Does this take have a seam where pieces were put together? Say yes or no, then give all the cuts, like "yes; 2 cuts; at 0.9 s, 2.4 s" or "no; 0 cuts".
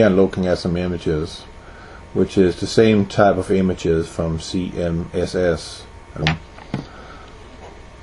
no; 0 cuts